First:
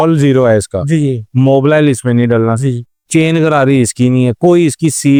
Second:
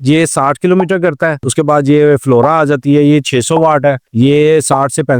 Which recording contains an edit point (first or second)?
second